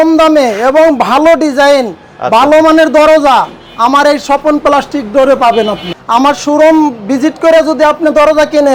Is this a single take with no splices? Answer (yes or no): no